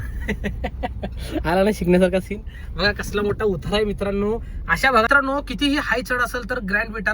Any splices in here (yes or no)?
yes